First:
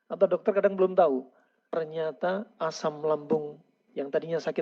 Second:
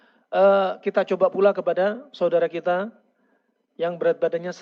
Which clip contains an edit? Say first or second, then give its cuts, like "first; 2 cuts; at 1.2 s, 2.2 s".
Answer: first; 1 cut; at 1.7 s